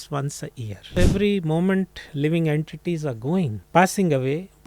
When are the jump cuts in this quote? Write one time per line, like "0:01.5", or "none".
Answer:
0:00.9
0:03.6